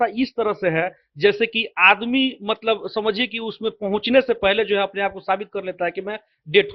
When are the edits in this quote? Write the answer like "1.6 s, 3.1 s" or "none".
none